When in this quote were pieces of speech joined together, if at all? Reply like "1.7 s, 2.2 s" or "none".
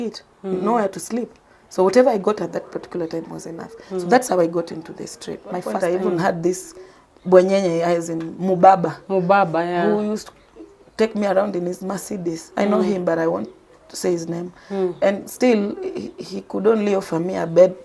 5.7 s